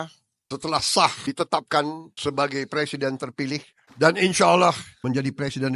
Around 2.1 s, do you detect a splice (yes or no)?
no